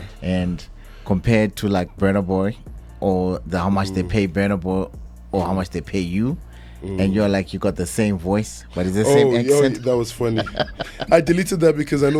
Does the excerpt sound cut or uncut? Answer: uncut